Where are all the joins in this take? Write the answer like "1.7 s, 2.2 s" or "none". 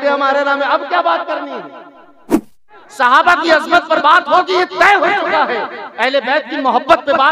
2.5 s